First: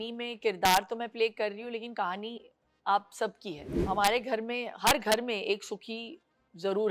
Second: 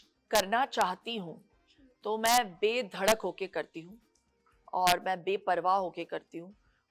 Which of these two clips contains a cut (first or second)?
first